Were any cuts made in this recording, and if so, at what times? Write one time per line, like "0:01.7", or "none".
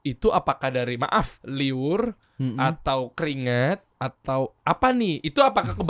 0:01.4
0:04.0